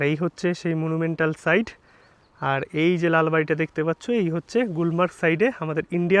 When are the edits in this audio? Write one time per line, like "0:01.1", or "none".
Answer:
none

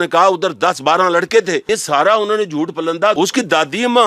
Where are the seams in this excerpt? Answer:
0:01.6
0:03.2

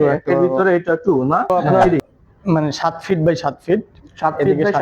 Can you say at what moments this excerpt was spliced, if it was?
0:02.0

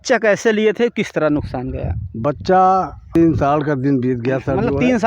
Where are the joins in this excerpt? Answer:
0:03.2

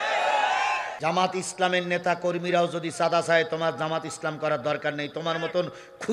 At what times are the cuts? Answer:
0:00.9

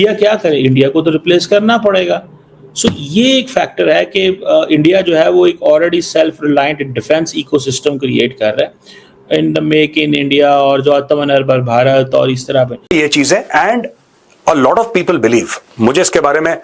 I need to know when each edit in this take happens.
0:12.8

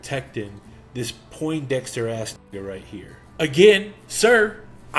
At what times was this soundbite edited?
0:03.2

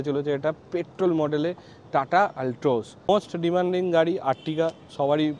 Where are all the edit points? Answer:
0:02.9

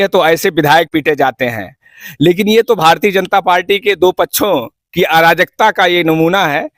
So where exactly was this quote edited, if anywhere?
none

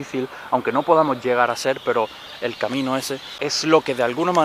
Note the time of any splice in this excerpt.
0:03.4

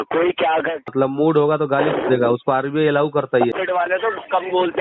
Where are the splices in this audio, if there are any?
0:00.9
0:03.6

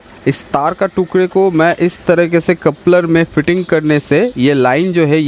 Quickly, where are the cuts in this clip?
none

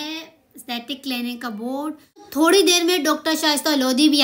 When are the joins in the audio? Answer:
0:02.3

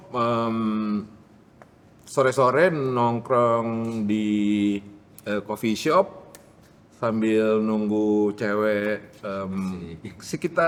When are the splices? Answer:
none

